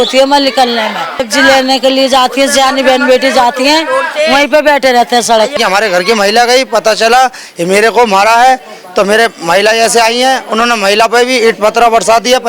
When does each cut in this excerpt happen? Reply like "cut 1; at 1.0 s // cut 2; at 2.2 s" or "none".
cut 1; at 1.3 s // cut 2; at 5.6 s